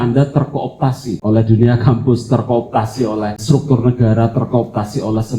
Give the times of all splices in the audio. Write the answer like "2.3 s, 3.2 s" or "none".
1.1 s, 3.4 s

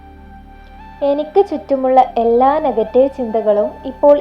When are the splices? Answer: 1.0 s

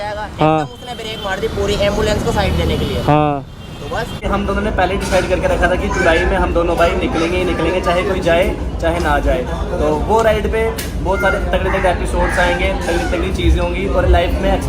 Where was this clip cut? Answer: 4.2 s

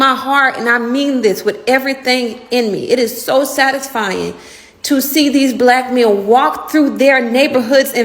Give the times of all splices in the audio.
none

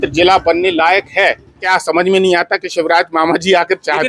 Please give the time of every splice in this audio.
1.6 s

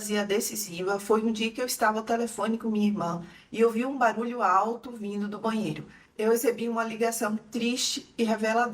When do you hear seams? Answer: 6.0 s

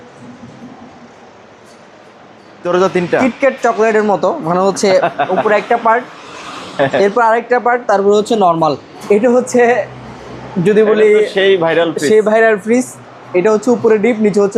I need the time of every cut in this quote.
2.6 s, 8.9 s

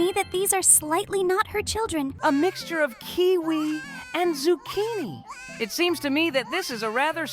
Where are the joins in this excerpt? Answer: 2.1 s

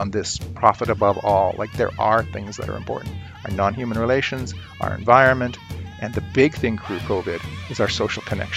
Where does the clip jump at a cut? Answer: none

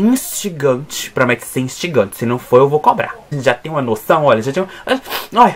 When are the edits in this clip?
3.2 s

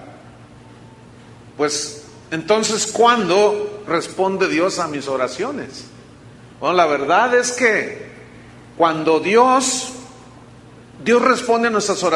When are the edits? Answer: 9.7 s

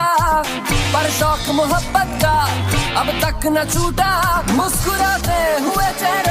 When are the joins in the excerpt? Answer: none

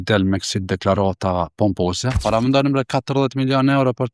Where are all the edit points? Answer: 2.1 s

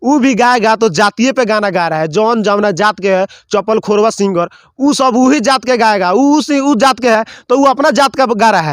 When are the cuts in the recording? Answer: none

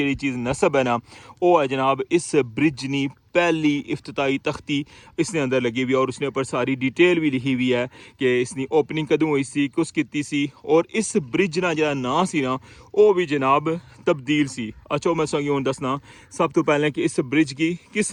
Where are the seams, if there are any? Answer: none

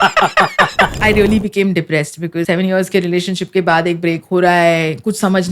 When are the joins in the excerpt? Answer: 0.9 s, 2.5 s

